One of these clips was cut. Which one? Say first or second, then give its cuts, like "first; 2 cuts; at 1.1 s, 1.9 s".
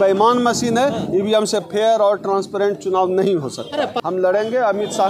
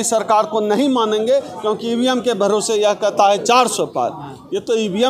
first; 1 cut; at 4.0 s